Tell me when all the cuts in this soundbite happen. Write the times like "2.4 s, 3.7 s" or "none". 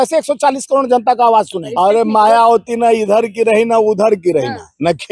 1.7 s